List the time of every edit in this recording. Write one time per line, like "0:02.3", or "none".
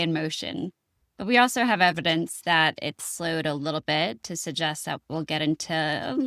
none